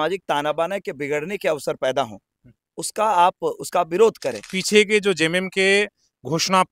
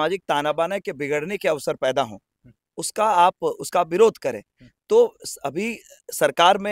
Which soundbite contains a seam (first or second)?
first